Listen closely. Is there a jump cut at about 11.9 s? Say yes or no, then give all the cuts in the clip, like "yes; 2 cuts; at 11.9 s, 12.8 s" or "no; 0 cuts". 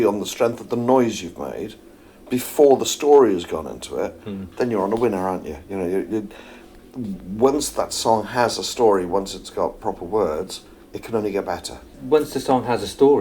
yes; 1 cut; at 11.9 s